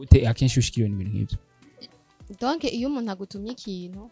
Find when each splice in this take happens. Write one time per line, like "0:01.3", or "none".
none